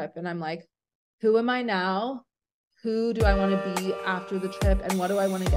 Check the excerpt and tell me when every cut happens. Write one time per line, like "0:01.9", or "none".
none